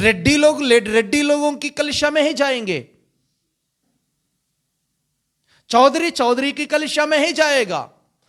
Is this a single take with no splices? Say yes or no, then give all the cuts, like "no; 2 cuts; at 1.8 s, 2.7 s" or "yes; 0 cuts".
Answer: yes; 0 cuts